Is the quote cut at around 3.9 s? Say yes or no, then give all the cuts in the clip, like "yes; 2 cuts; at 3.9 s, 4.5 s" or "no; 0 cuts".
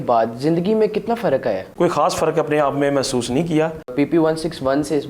yes; 2 cuts; at 1.7 s, 3.9 s